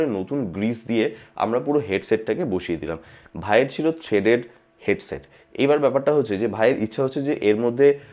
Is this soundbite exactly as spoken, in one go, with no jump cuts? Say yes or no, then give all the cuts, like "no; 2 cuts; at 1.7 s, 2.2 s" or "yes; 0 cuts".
yes; 0 cuts